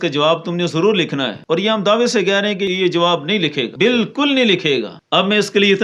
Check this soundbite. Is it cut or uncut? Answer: cut